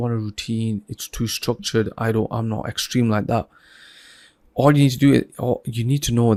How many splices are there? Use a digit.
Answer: 0